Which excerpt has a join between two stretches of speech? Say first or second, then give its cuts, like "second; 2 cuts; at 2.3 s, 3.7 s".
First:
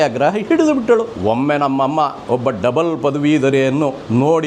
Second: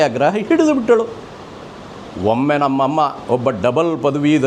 first; 1 cut; at 1.1 s